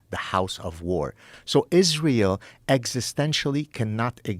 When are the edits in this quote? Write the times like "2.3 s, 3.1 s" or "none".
1.3 s